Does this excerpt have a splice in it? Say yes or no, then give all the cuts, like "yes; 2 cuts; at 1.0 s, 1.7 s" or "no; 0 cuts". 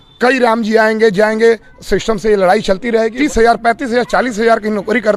yes; 1 cut; at 3.1 s